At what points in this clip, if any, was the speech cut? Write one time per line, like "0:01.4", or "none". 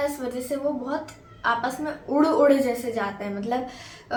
none